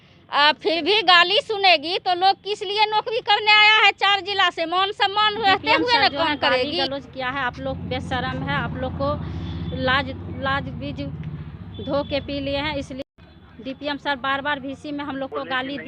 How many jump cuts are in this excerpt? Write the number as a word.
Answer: two